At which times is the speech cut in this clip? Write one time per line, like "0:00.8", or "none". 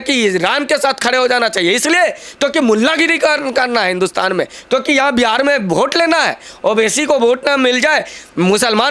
none